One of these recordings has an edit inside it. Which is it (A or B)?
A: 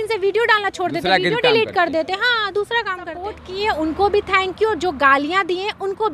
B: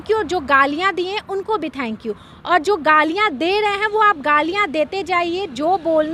A